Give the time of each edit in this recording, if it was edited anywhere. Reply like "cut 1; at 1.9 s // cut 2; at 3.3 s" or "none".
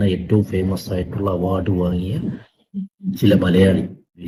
none